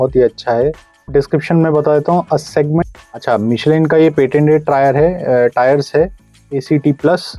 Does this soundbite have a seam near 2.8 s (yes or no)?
yes